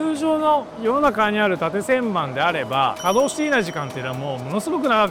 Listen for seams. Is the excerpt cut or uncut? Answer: uncut